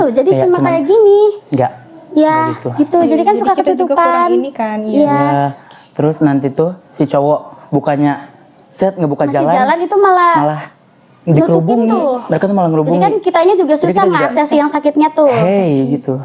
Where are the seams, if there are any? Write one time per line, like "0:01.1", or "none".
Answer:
none